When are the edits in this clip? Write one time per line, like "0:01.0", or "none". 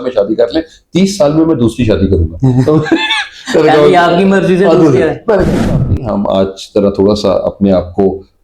0:05.6

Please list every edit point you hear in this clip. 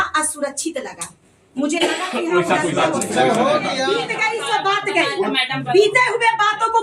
0:04.0

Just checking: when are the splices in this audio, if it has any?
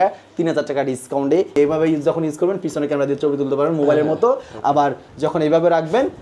0:01.5

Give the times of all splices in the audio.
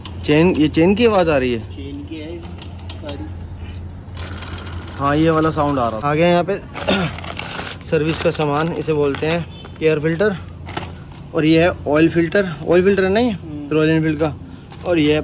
0:06.0

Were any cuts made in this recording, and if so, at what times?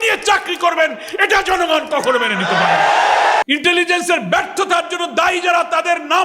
0:03.4

